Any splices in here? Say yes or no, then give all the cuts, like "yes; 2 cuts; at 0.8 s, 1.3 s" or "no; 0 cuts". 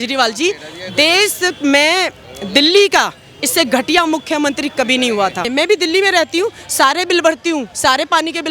yes; 1 cut; at 5.5 s